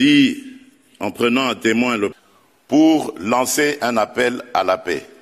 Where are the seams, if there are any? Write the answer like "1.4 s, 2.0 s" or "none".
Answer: 2.1 s